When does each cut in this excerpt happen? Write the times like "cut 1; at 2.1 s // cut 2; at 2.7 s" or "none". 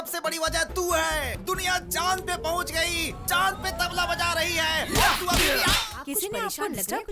cut 1; at 5.8 s